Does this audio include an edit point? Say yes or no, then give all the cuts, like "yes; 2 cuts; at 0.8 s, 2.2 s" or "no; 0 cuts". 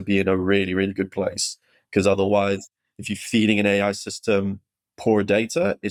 no; 0 cuts